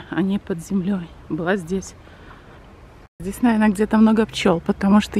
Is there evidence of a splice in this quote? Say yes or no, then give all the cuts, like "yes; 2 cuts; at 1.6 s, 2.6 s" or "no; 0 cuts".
yes; 1 cut; at 3.2 s